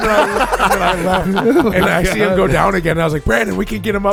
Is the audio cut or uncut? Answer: uncut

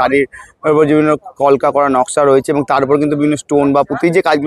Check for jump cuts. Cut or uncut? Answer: uncut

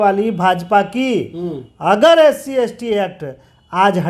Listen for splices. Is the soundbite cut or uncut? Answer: uncut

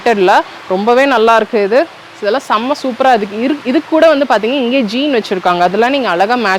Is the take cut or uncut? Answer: uncut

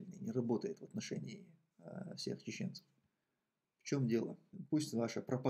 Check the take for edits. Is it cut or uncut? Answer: cut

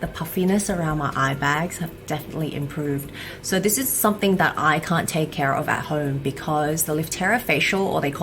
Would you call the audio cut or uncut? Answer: uncut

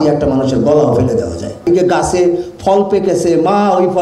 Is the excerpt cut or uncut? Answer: cut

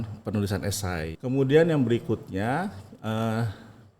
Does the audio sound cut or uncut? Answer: cut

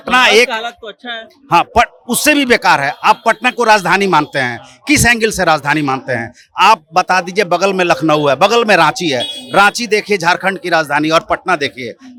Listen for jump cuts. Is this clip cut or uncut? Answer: uncut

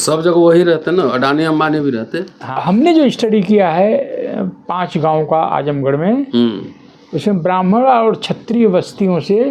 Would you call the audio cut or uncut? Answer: cut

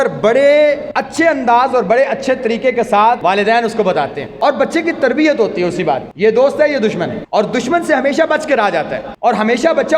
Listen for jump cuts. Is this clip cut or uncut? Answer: cut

